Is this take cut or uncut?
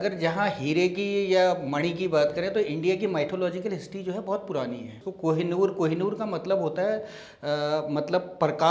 cut